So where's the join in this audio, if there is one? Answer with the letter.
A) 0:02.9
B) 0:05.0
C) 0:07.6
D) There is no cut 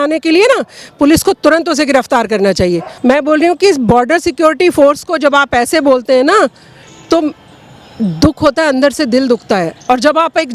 A